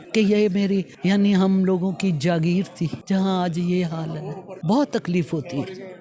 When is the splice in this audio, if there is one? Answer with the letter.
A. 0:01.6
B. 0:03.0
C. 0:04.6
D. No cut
B